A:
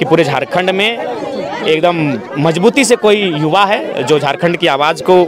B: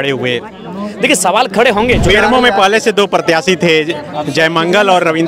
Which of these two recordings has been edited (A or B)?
B